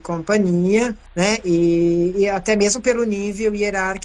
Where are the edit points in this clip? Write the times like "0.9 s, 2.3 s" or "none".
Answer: 1.0 s